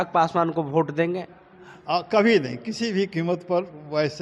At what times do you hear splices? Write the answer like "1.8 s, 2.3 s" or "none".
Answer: none